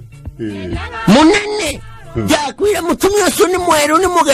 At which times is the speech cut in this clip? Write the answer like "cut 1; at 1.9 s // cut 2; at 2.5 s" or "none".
none